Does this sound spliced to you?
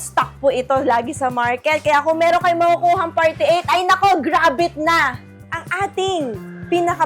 yes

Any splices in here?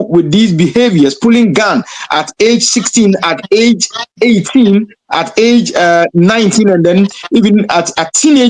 no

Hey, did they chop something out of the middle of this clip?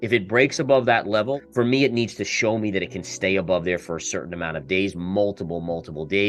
yes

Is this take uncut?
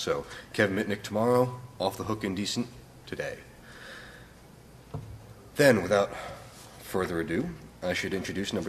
yes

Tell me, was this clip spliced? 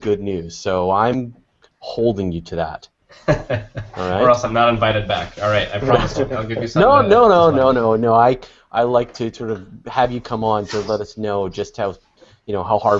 no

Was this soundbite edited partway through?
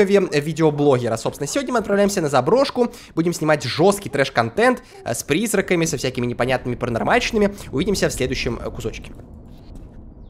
no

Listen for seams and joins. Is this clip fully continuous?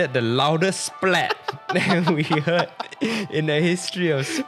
yes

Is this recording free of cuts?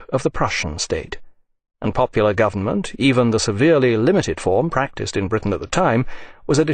yes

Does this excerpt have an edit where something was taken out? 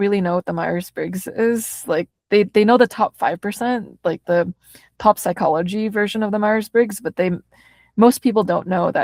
no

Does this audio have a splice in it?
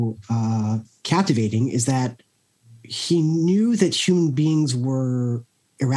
yes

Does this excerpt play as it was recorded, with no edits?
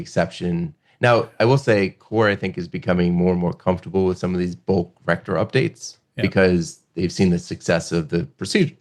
yes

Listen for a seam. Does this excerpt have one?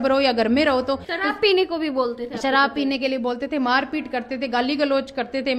yes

